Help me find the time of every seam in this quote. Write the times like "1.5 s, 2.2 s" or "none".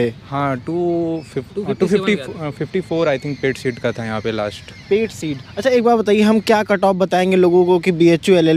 none